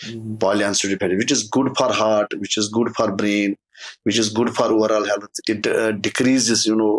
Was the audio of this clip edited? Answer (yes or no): no